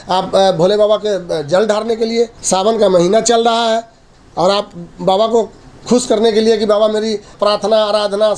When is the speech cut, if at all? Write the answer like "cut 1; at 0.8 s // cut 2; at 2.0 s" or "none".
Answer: cut 1; at 2.4 s // cut 2; at 7.3 s

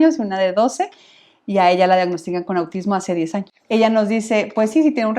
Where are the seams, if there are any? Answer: cut 1; at 3.5 s

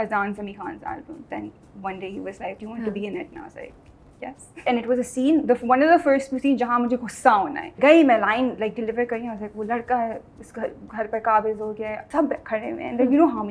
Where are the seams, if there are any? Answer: cut 1; at 1.2 s // cut 2; at 2.6 s // cut 3; at 4.6 s // cut 4; at 7.7 s // cut 5; at 12.0 s

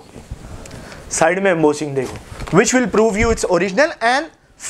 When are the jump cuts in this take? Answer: none

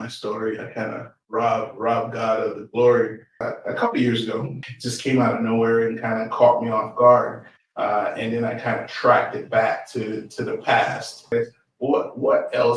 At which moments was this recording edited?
cut 1; at 3.4 s // cut 2; at 4.6 s // cut 3; at 11.3 s

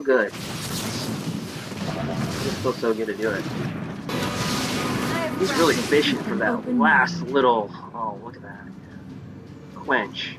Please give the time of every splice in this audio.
cut 1; at 4.1 s

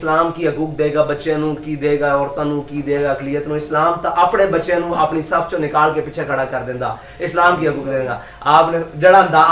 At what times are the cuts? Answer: none

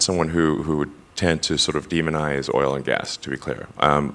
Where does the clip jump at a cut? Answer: none

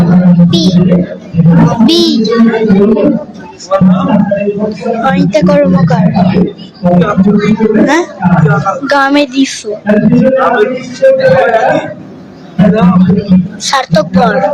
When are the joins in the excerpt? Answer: cut 1; at 1.6 s // cut 2; at 12.5 s

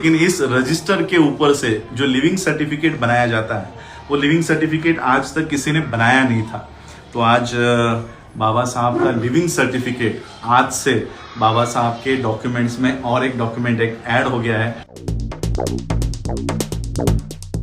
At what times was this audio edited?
cut 1; at 14.9 s

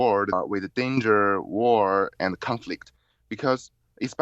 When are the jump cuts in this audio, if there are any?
none

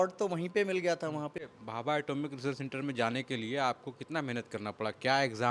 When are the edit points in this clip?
cut 1; at 1.4 s

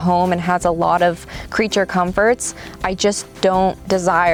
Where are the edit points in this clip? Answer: none

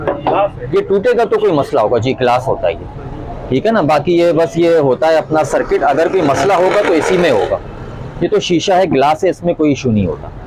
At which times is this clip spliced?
none

